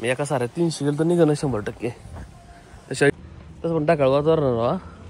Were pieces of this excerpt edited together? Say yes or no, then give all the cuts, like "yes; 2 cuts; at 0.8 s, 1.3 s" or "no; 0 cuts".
yes; 1 cut; at 3.1 s